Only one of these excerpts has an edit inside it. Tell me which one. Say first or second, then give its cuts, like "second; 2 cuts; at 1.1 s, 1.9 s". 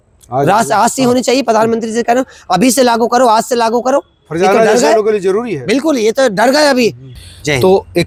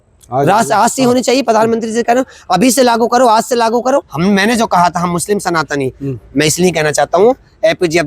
second; 1 cut; at 4.1 s